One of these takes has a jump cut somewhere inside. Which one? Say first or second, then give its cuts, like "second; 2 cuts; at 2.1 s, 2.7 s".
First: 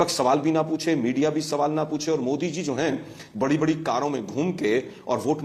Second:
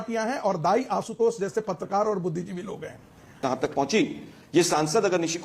second; 1 cut; at 3.4 s